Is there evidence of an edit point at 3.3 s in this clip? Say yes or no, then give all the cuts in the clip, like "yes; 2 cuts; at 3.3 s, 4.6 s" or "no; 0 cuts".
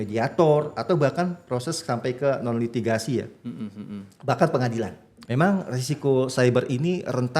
no; 1 cut; at 5.1 s